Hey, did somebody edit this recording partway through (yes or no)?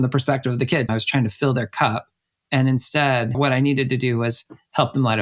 yes